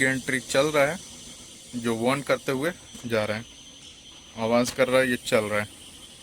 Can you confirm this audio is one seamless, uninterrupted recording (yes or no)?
yes